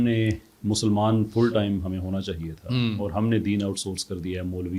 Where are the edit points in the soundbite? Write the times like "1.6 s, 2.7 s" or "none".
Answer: none